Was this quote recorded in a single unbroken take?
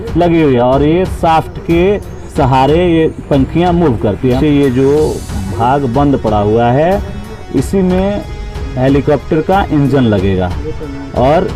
no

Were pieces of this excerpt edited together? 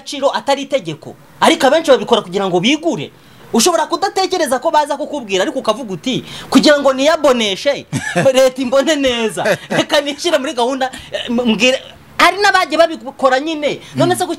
no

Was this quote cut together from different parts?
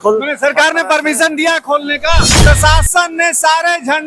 yes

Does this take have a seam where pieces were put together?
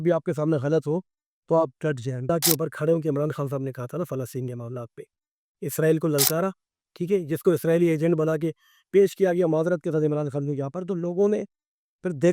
yes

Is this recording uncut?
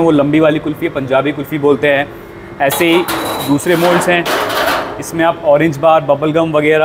yes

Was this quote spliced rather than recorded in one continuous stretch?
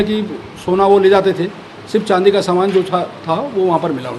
no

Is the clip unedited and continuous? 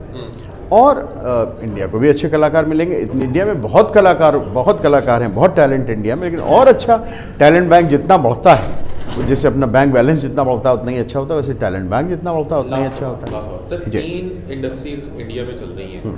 yes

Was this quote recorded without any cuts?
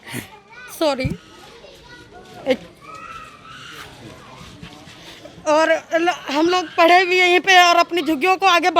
yes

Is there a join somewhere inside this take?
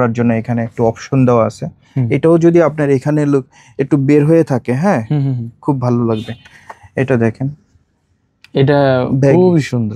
no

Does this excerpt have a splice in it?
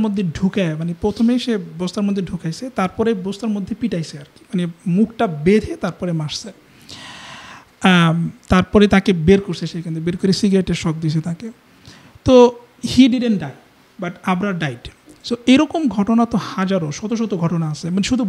no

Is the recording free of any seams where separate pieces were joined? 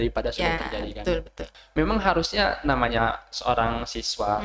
no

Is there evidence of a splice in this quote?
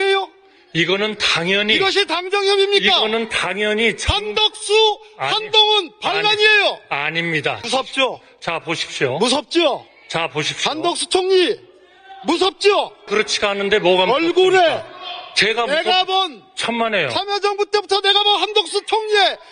yes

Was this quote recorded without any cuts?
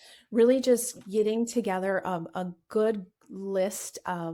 yes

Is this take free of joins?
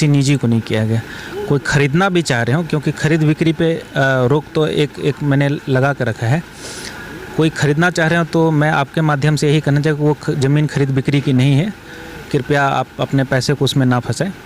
yes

